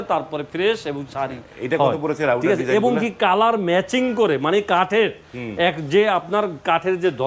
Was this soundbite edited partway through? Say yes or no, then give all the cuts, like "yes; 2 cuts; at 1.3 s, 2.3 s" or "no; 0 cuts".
no; 0 cuts